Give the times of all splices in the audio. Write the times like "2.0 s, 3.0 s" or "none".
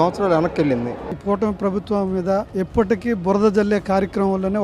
1.1 s